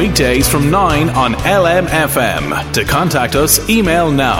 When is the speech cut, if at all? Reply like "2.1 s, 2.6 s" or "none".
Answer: none